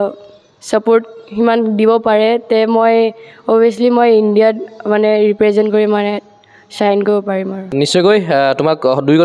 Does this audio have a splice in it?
no; 0 cuts

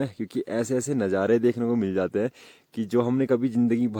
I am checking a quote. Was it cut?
no; 0 cuts

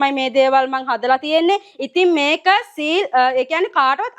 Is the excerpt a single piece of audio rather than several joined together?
yes; 0 cuts

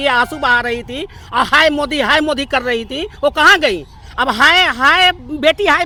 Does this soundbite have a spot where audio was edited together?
no; 0 cuts

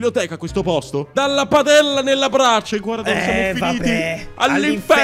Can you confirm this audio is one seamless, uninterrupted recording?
no; 1 cut; at 1.1 s

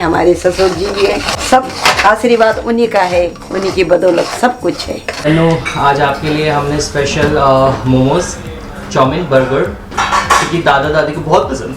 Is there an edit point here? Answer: yes; 2 cuts; at 1.3 s, 5.2 s

